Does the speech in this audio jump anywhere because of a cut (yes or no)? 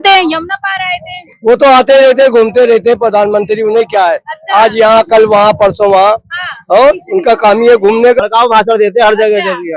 yes